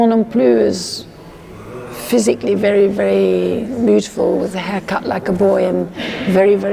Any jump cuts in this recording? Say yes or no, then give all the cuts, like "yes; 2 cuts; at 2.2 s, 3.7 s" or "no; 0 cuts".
no; 0 cuts